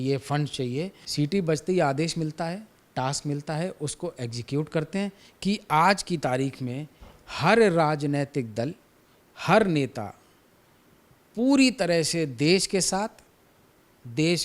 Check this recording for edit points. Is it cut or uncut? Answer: cut